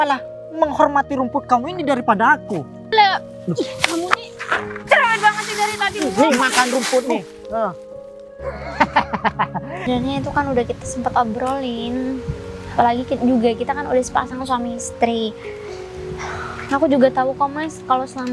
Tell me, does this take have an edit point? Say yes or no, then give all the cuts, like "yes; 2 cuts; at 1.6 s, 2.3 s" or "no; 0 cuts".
yes; 2 cuts; at 2.9 s, 9.9 s